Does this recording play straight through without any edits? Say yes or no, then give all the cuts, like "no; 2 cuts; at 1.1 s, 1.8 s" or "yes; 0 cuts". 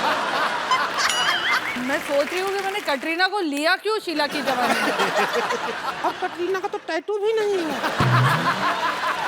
no; 1 cut; at 1.8 s